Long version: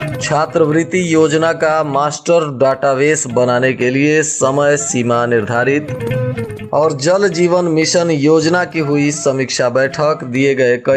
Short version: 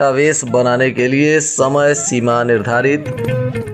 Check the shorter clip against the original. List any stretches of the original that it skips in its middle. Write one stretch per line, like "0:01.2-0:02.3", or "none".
none